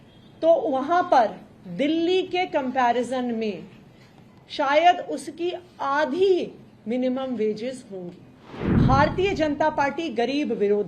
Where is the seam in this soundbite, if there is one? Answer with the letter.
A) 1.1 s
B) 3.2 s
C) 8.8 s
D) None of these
C